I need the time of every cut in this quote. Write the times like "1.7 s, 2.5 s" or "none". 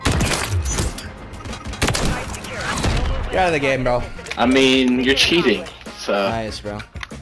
1.6 s, 4.2 s

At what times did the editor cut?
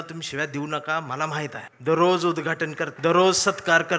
1.7 s, 2.9 s

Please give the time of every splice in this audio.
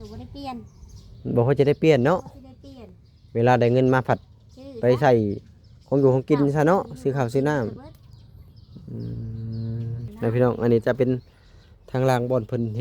10.1 s

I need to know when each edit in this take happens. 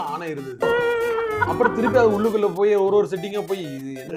none

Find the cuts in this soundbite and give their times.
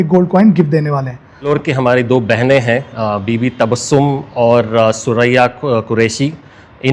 1.5 s

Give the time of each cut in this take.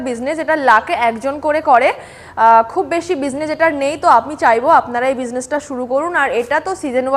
none

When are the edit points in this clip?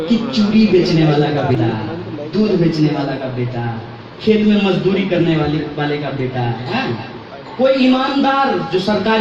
1.5 s

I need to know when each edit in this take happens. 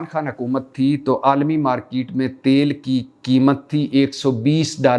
none

